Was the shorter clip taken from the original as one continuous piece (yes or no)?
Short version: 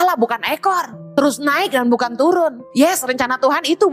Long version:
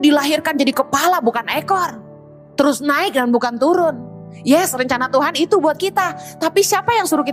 no